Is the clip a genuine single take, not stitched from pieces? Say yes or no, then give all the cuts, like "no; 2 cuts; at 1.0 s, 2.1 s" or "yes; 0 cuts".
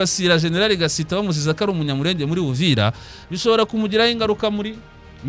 yes; 0 cuts